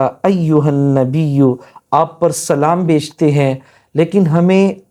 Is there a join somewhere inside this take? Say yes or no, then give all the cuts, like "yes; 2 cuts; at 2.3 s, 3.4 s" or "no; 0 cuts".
no; 0 cuts